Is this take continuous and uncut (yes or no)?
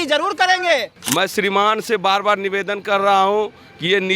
no